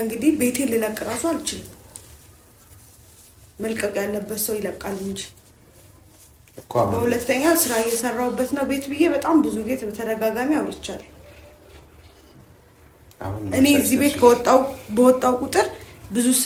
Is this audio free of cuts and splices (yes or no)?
yes